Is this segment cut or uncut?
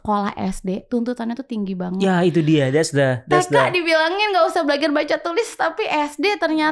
uncut